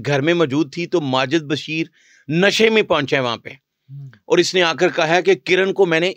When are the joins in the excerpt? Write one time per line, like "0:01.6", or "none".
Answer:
none